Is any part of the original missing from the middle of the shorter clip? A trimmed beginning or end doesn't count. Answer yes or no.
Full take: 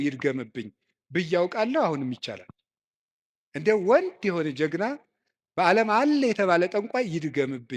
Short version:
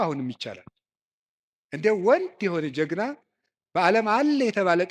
no